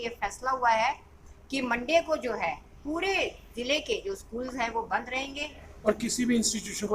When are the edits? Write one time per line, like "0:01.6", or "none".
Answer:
0:05.7